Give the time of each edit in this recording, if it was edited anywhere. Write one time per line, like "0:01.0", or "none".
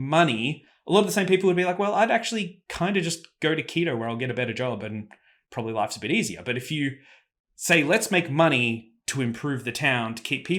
none